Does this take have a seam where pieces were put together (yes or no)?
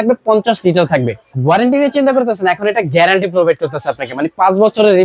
yes